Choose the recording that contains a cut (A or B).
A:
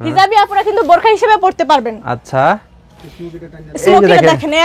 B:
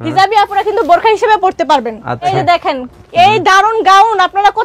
B